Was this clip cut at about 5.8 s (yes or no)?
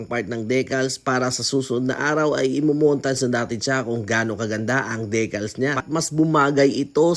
yes